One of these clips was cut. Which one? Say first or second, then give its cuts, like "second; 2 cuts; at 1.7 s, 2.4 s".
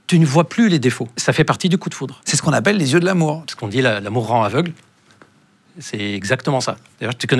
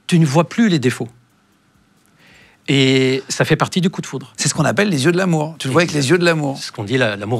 first; 2 cuts; at 1.2 s, 3.5 s